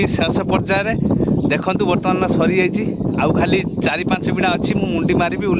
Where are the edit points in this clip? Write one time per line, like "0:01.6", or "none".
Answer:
none